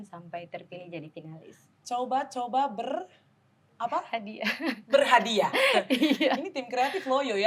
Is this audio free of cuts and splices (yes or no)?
yes